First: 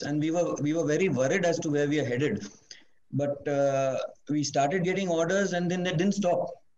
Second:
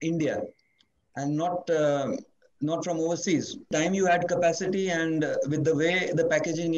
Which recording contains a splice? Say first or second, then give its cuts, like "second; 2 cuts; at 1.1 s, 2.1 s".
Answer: second; 1 cut; at 3.7 s